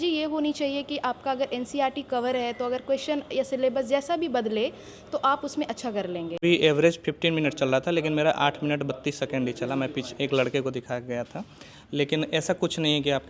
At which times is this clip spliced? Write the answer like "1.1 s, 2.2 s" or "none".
6.4 s